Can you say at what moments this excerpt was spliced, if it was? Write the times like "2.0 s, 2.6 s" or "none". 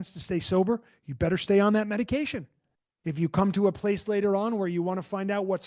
none